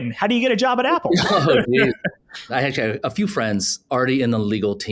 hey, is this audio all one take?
no; 2 cuts; at 2.5 s, 3.8 s

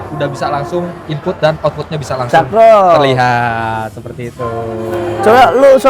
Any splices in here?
no; 0 cuts

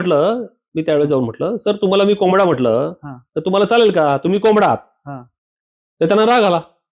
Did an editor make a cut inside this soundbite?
no; 0 cuts

